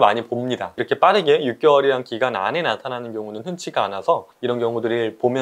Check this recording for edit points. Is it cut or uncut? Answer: cut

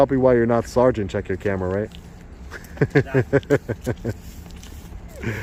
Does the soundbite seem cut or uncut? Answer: uncut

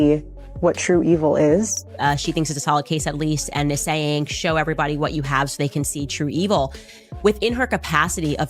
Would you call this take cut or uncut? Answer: cut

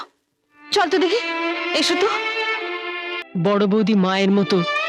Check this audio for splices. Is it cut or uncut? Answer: cut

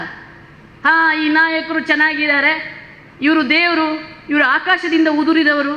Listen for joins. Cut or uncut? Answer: uncut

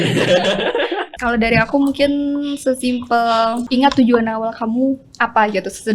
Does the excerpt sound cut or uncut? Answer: cut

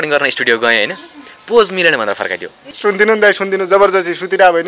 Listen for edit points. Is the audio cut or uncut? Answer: cut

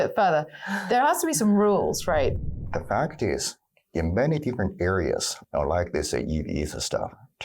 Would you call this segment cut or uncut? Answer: cut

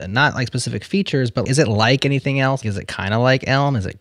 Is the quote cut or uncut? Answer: cut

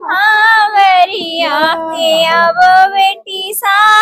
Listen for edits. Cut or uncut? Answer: cut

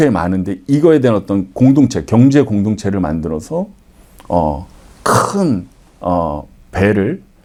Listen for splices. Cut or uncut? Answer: uncut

